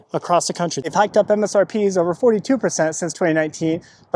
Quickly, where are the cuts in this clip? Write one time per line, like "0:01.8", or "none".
0:00.9